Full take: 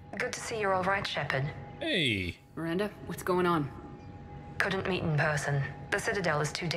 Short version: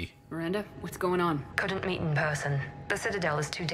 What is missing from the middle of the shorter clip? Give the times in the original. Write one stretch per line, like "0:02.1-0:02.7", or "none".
0:03.8-0:04.5